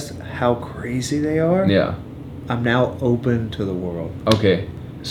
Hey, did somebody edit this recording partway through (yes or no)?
no